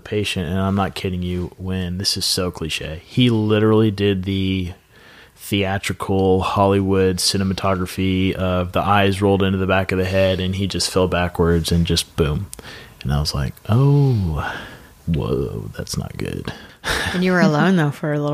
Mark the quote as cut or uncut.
uncut